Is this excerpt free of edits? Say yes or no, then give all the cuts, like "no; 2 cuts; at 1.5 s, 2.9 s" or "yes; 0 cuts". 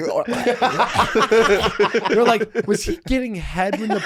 yes; 0 cuts